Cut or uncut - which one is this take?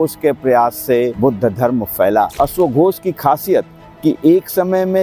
cut